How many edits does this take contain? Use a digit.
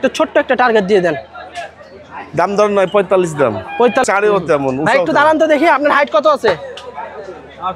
1